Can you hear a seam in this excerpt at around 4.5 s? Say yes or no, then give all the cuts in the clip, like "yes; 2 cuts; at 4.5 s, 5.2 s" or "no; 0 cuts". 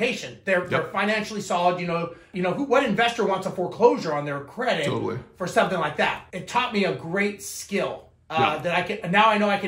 no; 2 cuts; at 2.3 s, 6.2 s